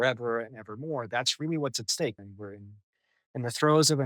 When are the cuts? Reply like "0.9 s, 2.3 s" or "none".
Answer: 2.2 s